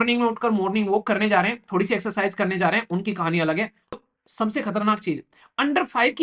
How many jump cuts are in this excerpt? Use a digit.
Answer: 1